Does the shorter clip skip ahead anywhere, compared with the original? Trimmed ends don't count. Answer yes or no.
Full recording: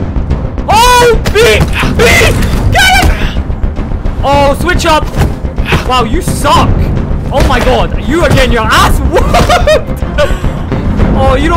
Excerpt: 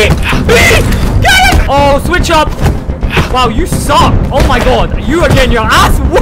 yes